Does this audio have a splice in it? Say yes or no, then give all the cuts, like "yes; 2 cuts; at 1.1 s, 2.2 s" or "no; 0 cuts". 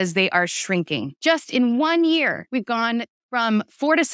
yes; 2 cuts; at 1.1 s, 2.4 s